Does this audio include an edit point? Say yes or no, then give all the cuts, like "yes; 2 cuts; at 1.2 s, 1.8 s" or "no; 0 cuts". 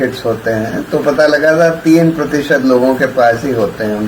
no; 0 cuts